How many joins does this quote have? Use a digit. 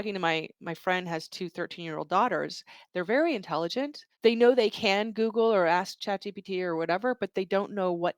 2